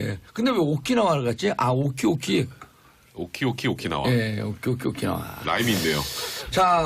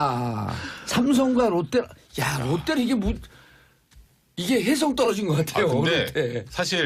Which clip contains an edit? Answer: first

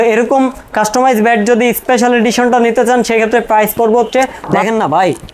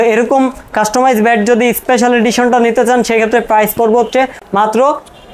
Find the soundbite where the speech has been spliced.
first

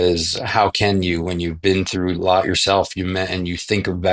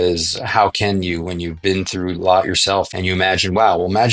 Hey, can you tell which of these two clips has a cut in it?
second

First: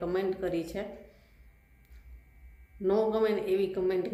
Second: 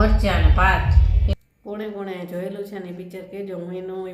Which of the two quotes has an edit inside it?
second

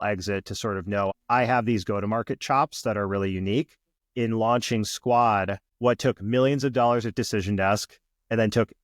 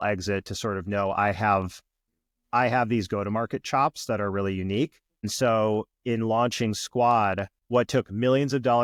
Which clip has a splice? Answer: first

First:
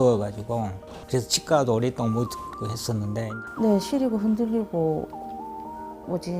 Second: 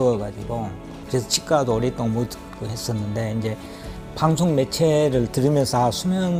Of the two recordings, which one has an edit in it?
first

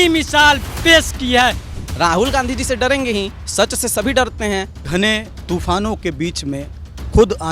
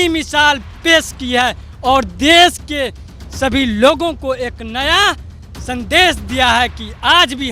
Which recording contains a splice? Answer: first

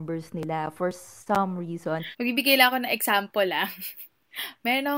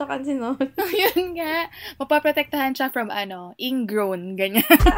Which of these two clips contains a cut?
first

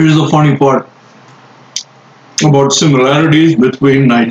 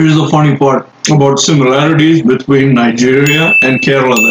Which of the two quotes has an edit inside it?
second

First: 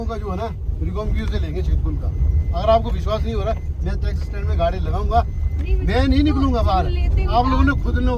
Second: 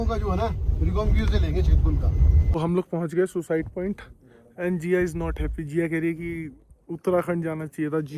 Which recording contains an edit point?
second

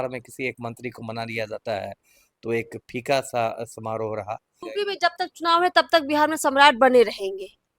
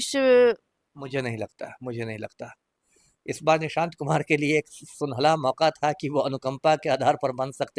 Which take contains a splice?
first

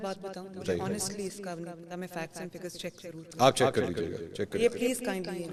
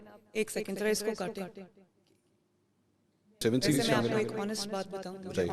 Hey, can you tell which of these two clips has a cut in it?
second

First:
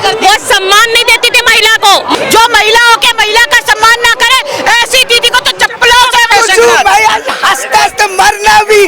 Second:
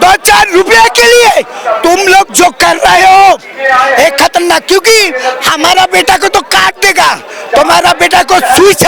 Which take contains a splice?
first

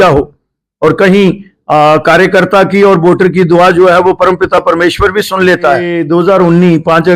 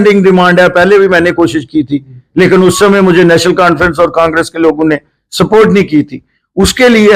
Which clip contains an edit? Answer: first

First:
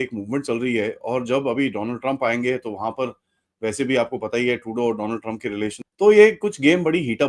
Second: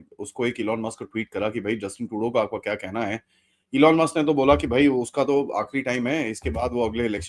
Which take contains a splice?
first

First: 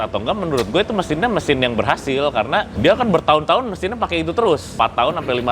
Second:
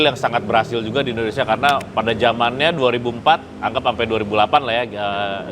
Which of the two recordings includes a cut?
first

